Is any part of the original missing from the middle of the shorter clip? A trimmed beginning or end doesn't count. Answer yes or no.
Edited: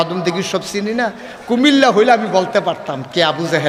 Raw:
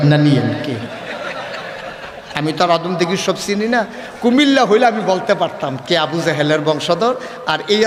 no